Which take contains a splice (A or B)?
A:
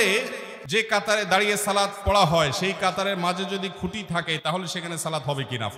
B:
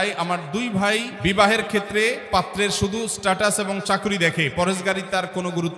B